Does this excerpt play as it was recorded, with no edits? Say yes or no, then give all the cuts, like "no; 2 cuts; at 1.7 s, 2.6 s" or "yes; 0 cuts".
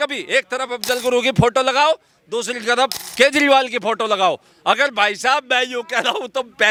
yes; 0 cuts